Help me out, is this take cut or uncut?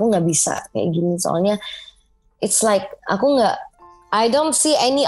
uncut